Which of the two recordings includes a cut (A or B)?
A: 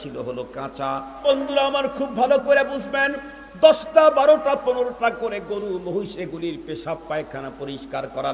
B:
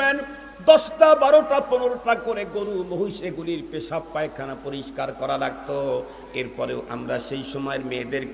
A